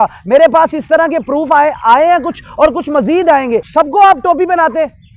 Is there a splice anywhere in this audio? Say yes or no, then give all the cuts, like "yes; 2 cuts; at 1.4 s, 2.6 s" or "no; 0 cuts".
yes; 1 cut; at 3.7 s